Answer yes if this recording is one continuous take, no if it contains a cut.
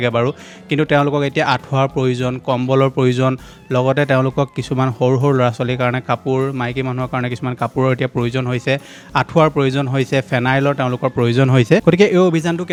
yes